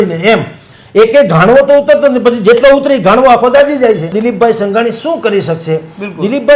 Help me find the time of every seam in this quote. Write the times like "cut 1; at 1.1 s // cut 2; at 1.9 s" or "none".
cut 1; at 4.1 s